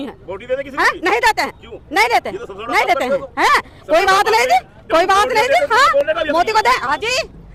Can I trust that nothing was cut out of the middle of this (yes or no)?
yes